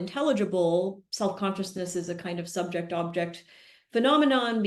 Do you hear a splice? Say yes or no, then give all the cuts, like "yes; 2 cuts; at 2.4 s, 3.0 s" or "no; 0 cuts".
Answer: yes; 1 cut; at 1.0 s